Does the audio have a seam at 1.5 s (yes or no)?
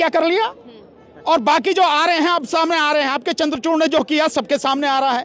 no